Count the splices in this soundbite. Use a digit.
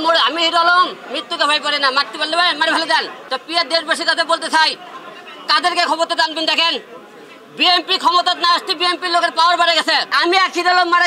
2